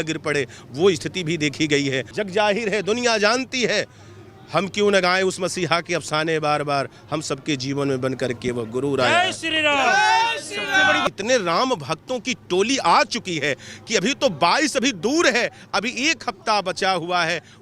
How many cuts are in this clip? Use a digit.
2